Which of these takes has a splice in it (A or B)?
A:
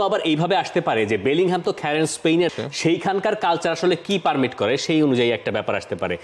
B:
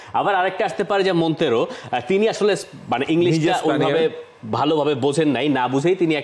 A